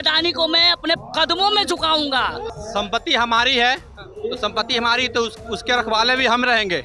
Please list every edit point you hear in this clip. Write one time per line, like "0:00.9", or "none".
0:02.5